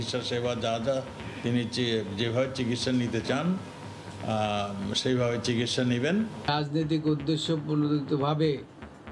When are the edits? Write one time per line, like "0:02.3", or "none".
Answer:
0:06.5

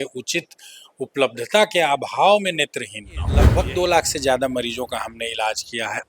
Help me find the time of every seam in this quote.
0:03.5

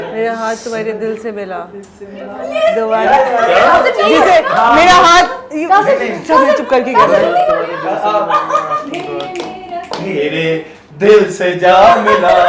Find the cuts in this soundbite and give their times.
none

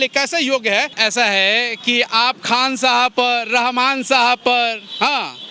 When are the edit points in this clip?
0:00.9

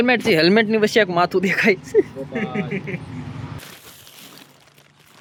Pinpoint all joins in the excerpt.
none

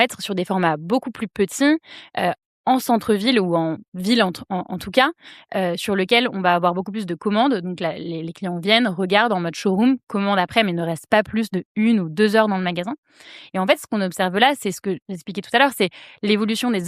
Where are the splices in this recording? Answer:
none

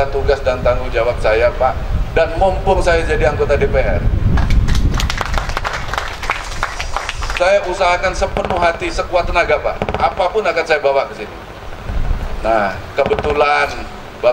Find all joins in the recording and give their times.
none

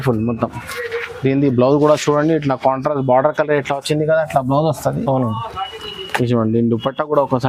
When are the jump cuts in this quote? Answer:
none

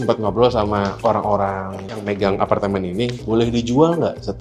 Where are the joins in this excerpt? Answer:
0:01.0
0:02.0

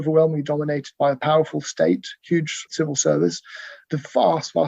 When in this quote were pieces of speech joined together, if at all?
0:02.6
0:03.7

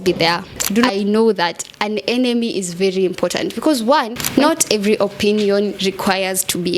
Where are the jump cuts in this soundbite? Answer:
0:00.9
0:04.2

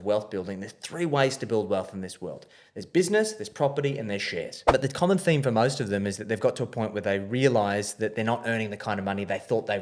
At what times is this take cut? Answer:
0:04.5

